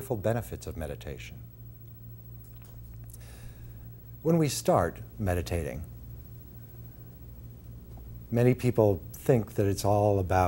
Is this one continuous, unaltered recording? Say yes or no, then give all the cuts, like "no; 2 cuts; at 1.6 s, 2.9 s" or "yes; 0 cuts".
yes; 0 cuts